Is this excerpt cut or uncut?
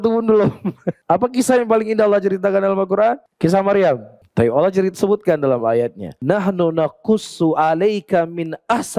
cut